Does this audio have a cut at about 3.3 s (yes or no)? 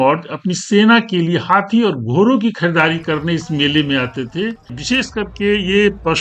no